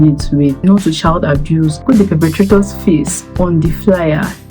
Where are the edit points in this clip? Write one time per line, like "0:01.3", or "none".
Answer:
0:01.8